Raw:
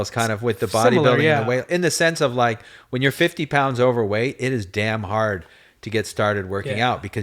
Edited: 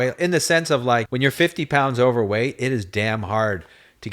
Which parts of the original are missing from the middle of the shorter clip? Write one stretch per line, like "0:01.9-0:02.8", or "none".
0:02.6-0:02.9